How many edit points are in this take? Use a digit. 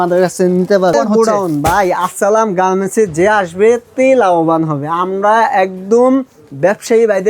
1